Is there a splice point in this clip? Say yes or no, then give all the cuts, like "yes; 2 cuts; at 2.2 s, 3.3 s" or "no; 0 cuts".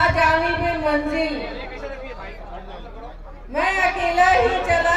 no; 0 cuts